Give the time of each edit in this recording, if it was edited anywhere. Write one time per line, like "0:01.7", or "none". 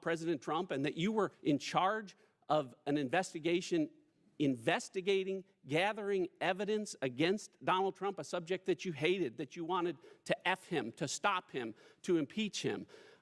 0:01.4